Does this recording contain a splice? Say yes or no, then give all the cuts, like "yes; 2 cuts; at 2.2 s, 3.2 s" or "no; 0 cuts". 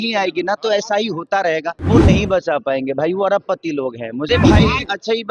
yes; 2 cuts; at 1.8 s, 4.3 s